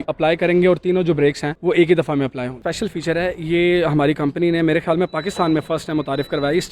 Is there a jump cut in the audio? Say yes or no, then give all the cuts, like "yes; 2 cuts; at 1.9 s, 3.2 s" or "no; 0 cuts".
yes; 1 cut; at 2.6 s